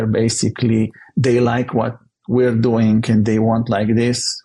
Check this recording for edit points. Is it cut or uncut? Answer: uncut